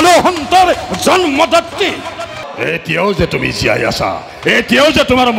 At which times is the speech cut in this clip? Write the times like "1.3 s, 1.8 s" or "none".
2.4 s